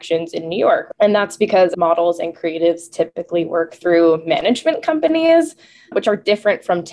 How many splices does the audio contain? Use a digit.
2